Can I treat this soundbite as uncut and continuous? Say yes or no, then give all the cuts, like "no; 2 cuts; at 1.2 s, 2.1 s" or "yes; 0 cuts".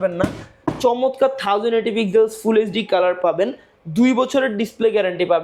yes; 0 cuts